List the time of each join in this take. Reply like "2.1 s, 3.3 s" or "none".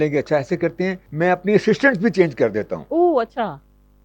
1.0 s